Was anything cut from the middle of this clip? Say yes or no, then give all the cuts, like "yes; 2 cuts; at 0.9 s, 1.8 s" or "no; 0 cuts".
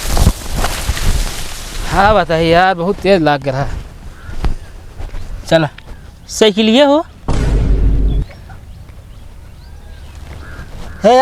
no; 0 cuts